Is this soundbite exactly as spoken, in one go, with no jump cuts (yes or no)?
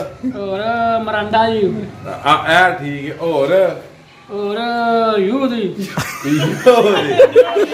yes